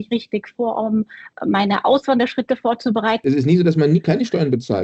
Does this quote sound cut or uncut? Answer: cut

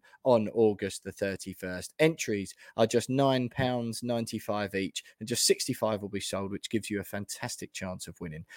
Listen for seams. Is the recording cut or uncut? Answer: uncut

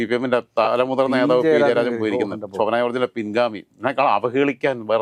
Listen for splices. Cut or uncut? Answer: uncut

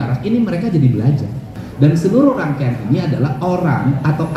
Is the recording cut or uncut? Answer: cut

